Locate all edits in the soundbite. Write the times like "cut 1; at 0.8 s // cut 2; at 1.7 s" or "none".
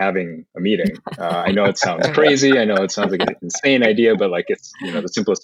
none